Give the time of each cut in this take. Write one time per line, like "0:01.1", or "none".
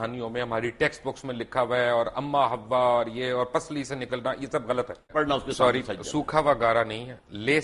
0:05.1